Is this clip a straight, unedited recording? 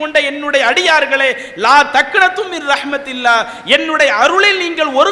yes; 0 cuts

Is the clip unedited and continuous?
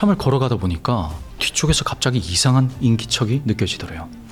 yes; 0 cuts

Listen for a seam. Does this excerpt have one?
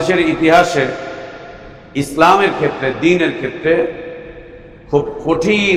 no; 0 cuts

